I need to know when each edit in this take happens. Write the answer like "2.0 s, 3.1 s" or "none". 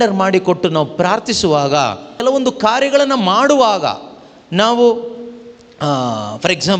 2.2 s